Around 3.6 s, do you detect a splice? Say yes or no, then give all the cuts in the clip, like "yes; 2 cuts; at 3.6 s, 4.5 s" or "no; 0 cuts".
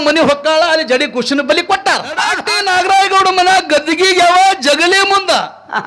no; 1 cut; at 2.3 s